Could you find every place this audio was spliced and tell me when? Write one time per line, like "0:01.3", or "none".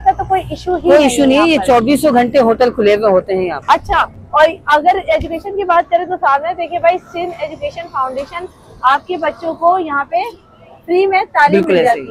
none